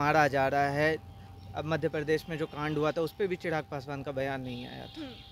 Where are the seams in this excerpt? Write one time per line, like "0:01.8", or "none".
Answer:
none